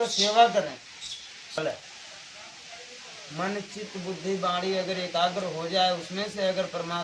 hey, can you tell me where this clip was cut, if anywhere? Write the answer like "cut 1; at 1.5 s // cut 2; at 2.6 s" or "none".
cut 1; at 1.6 s